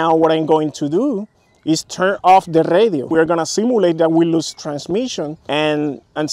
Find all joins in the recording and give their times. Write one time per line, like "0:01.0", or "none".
0:03.0
0:05.4

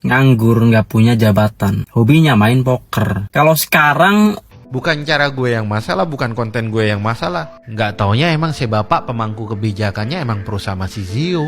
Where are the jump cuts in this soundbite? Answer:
0:04.5

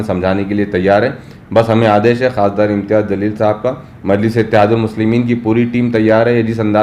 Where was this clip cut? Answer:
none

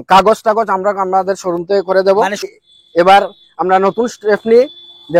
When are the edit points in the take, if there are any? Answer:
0:02.4

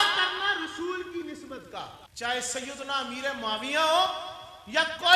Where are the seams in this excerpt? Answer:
0:02.0

